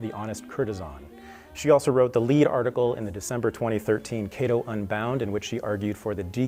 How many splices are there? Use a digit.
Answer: 0